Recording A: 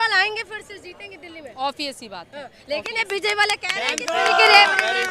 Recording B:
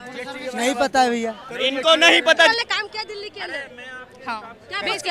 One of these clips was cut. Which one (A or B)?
B